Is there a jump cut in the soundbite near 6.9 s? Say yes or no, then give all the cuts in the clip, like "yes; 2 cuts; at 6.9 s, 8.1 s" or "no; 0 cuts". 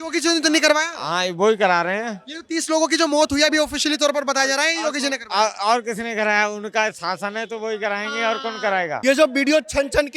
no; 1 cut; at 8.9 s